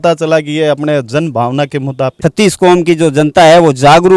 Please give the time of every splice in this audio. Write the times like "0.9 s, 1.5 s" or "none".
2.1 s